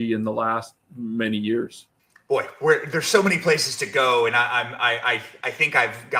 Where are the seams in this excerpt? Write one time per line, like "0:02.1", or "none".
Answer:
none